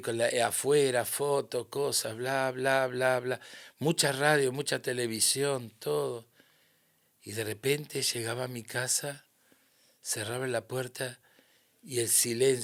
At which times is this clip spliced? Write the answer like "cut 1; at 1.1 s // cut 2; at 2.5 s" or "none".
none